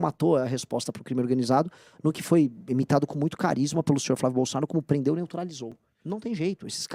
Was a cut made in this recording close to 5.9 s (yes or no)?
yes